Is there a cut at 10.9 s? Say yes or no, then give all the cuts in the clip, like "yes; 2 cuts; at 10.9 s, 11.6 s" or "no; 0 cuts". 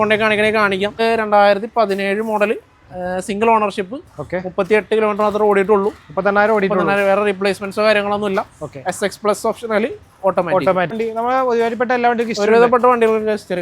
yes; 2 cuts; at 1.0 s, 10.9 s